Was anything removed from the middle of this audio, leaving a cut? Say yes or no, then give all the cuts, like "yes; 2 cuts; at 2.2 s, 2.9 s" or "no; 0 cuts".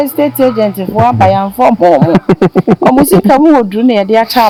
no; 0 cuts